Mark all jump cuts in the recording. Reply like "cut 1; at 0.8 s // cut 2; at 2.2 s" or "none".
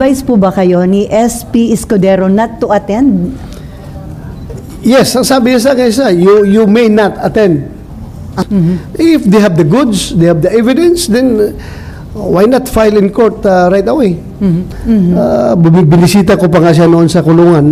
cut 1; at 8.3 s // cut 2; at 14.7 s